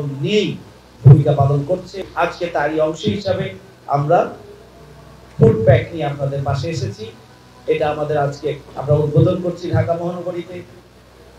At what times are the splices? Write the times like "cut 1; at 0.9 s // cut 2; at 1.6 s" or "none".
cut 1; at 2.1 s